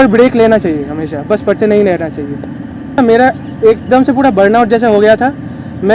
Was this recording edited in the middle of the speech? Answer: yes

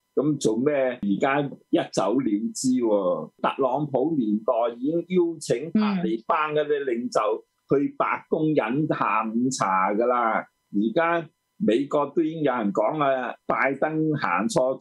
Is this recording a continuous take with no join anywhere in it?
no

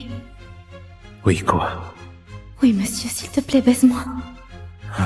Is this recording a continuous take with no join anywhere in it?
yes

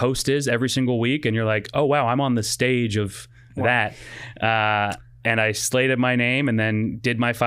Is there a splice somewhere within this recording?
no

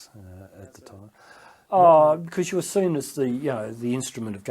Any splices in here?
yes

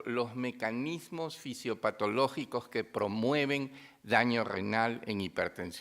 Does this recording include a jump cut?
yes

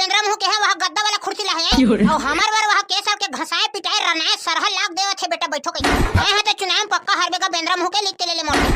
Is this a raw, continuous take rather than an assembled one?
no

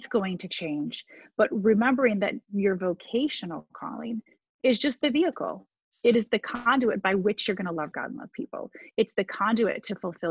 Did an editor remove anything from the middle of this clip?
no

